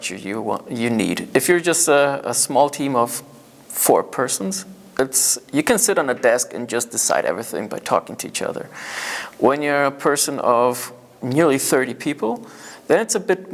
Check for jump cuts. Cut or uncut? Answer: uncut